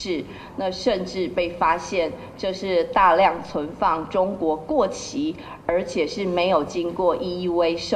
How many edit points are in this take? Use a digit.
0